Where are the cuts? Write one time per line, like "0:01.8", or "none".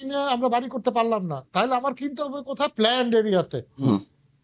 none